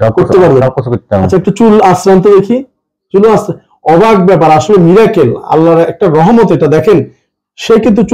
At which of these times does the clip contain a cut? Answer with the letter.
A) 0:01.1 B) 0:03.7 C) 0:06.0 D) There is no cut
D